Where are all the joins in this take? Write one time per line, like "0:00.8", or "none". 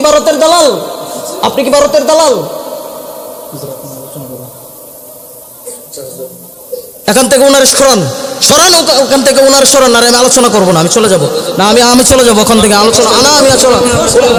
none